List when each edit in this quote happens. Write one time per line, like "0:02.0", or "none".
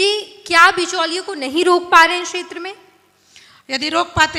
none